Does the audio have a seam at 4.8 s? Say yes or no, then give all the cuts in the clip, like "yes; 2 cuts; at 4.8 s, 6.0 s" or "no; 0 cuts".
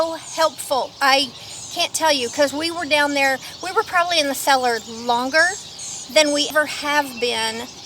no; 1 cut; at 6.5 s